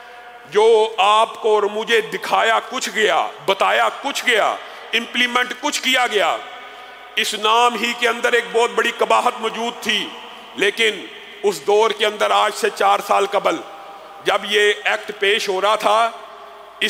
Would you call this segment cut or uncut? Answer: uncut